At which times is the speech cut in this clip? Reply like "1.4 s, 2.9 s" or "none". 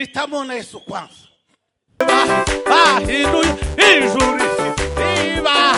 2.0 s